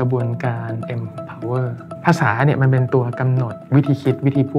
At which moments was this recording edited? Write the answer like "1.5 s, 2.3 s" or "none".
1.9 s, 3.5 s